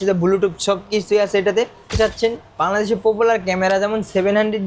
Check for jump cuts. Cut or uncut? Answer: cut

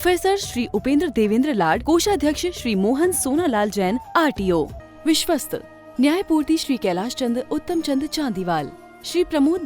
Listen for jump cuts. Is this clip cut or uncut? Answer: cut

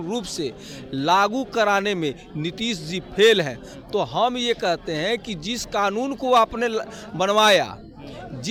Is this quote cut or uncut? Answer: uncut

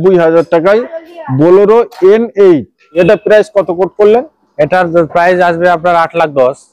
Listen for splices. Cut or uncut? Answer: cut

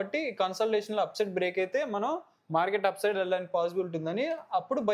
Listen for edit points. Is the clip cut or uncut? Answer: uncut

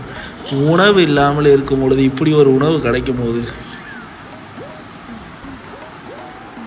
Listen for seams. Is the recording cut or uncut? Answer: uncut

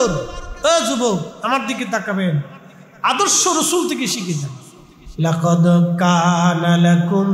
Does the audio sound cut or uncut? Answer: uncut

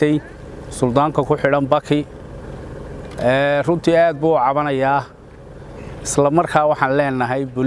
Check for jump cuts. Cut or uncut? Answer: uncut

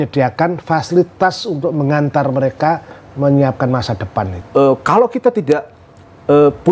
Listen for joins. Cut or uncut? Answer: cut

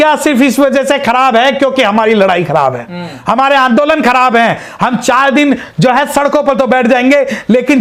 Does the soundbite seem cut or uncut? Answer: uncut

